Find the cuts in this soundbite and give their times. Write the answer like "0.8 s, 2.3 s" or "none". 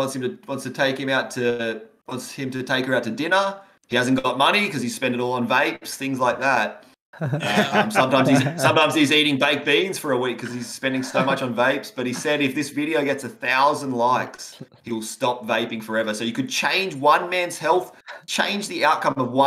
none